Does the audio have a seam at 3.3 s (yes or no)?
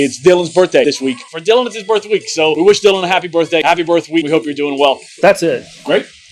no